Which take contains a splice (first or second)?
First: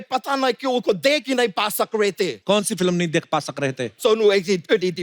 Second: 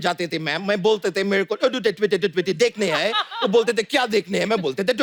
first